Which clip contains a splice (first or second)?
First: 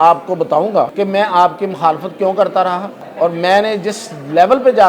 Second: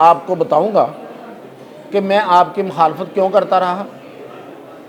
first